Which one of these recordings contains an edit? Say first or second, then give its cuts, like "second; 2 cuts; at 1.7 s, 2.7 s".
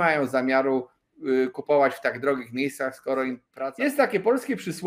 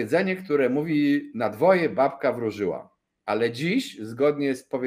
first; 1 cut; at 3.5 s